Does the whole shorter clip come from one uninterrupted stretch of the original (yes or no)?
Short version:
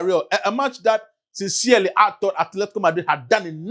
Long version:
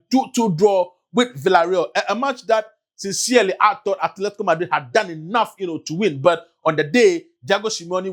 yes